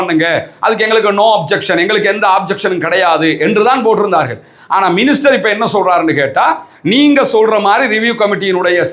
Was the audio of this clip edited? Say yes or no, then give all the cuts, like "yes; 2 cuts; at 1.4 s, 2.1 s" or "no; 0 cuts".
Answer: no; 0 cuts